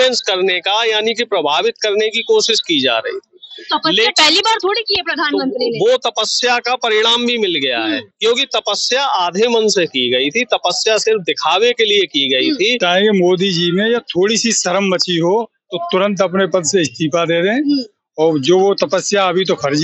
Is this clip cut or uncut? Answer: cut